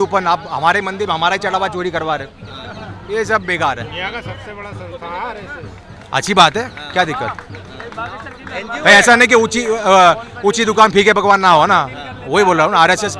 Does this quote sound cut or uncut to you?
uncut